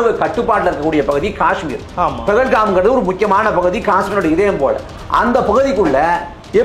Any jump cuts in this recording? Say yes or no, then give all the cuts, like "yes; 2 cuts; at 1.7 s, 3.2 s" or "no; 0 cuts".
no; 0 cuts